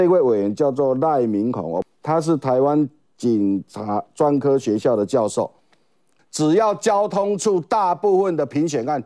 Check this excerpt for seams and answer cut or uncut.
cut